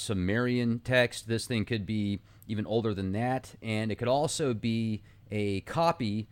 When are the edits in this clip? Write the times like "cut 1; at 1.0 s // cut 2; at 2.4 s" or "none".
none